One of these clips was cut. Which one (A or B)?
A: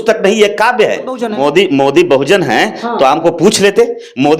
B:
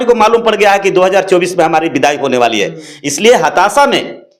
A